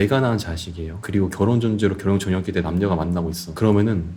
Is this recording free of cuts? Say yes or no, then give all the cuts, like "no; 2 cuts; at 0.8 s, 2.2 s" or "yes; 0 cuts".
yes; 0 cuts